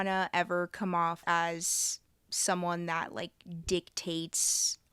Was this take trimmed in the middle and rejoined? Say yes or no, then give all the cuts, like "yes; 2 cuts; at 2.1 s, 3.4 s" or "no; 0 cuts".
yes; 1 cut; at 1.2 s